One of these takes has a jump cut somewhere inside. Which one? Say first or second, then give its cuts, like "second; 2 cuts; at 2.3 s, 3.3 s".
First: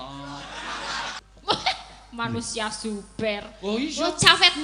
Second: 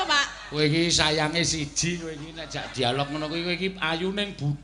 first; 1 cut; at 1.2 s